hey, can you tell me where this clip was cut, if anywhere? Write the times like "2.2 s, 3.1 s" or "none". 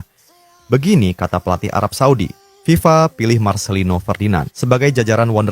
2.4 s, 4.5 s